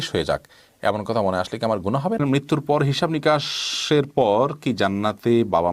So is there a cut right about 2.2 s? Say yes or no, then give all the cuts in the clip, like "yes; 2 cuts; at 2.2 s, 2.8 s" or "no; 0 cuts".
yes; 1 cut; at 2.2 s